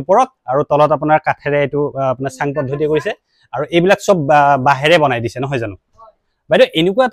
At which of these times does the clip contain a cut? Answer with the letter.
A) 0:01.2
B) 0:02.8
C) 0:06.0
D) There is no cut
C